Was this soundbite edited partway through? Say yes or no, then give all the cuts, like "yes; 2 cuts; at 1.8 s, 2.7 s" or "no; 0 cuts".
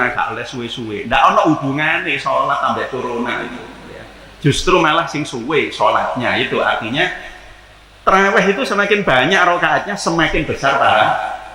no; 0 cuts